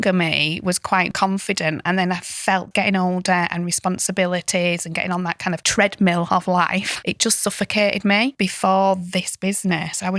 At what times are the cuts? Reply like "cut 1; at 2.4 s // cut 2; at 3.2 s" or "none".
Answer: cut 1; at 1.1 s // cut 2; at 2.7 s // cut 3; at 5.6 s // cut 4; at 6.9 s // cut 5; at 8.3 s